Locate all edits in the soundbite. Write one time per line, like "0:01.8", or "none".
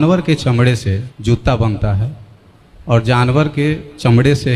0:01.1